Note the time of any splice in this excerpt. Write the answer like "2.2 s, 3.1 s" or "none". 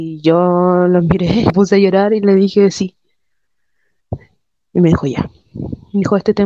1.5 s